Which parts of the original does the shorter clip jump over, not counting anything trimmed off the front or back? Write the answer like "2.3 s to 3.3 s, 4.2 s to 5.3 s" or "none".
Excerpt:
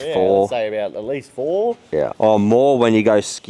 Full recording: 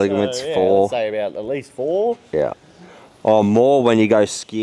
2.5 s to 3.2 s

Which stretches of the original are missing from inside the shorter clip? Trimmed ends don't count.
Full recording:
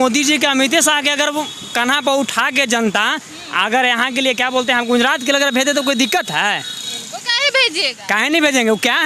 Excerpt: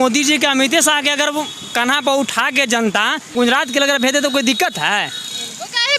3.3 s to 4.8 s

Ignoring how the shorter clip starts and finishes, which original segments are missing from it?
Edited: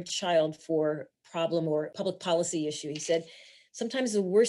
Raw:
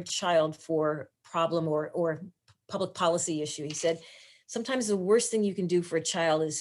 1.9 s to 2.6 s

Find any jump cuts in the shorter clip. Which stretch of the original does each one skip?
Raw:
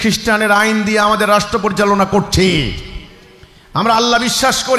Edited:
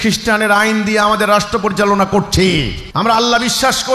2.8 s to 3.6 s

